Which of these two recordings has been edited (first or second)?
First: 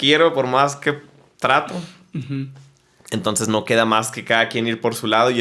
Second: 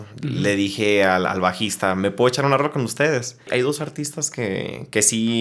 second